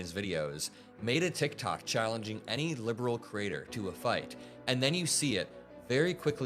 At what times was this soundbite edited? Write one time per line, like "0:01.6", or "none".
none